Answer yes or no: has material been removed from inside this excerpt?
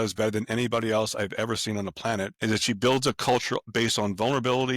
yes